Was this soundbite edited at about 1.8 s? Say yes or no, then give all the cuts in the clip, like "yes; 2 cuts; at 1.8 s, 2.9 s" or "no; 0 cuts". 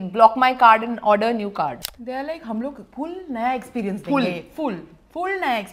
yes; 1 cut; at 1.8 s